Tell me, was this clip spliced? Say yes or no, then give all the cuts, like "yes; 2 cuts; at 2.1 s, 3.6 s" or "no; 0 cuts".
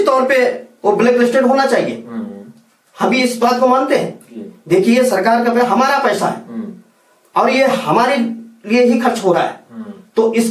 no; 0 cuts